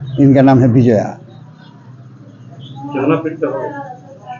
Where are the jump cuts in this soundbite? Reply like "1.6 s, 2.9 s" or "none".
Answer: none